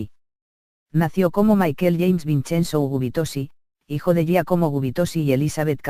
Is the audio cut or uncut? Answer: cut